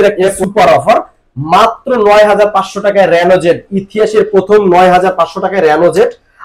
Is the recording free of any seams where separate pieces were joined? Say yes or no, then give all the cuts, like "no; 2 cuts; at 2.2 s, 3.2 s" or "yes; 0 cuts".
yes; 0 cuts